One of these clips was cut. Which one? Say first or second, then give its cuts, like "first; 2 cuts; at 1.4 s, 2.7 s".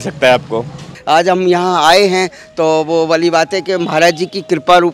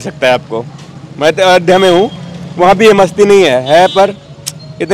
first; 1 cut; at 1.0 s